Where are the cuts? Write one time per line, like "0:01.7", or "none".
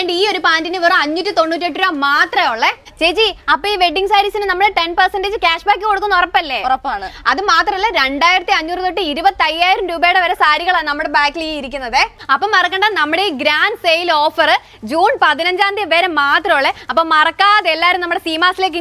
0:02.9
0:12.2